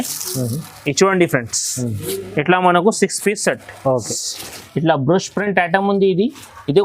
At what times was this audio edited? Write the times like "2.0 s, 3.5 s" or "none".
4.2 s